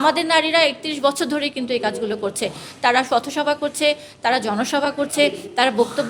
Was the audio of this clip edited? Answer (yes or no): no